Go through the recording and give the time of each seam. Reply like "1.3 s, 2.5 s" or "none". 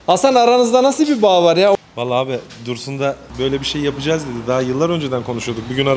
1.8 s, 3.3 s